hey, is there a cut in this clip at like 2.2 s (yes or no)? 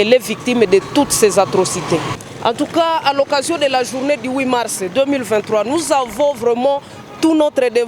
yes